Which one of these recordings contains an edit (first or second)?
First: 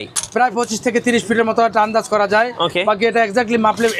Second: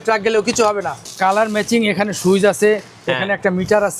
second